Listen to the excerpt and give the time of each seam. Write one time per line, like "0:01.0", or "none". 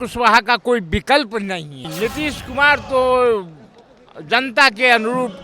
0:01.9